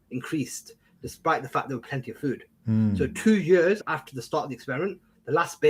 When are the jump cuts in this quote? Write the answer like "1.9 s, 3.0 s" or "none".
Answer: 3.8 s